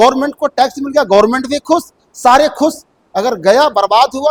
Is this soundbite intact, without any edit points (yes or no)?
yes